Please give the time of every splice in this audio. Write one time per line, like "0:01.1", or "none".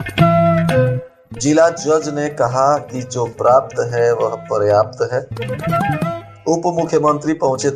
0:01.1